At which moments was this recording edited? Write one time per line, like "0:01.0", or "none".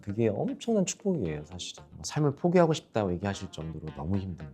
0:01.7